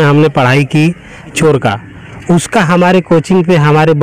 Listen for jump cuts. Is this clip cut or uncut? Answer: cut